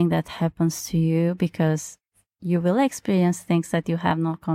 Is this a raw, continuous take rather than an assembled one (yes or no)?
yes